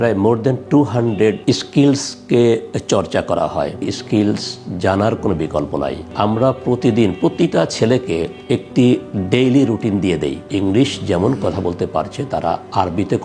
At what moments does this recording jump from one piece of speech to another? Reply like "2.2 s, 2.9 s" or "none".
3.9 s, 6.1 s, 10.5 s